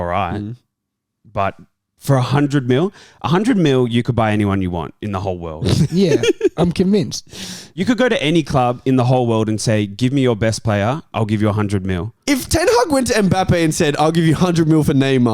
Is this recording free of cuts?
no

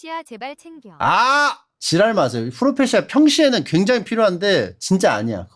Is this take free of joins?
yes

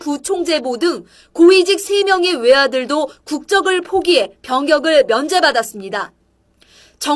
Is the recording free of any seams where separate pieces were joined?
no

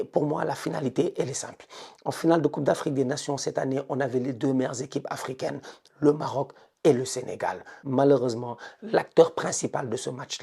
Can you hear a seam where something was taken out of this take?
yes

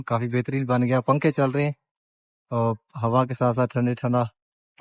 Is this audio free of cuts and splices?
yes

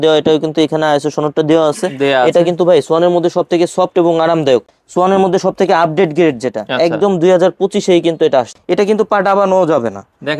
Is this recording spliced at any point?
yes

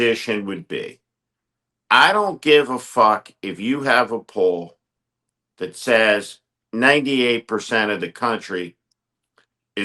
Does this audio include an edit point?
no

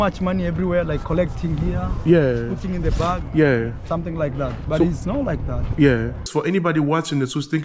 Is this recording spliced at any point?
yes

